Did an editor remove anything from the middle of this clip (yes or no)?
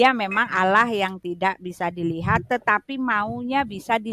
no